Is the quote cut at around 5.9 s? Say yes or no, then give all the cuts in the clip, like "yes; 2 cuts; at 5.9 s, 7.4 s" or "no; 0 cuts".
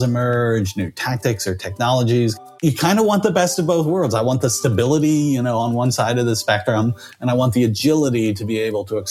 no; 1 cut; at 2.4 s